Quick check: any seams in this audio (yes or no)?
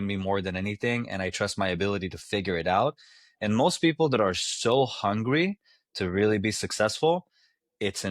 no